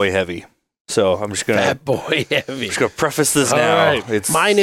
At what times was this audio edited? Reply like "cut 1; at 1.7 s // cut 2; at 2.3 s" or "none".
none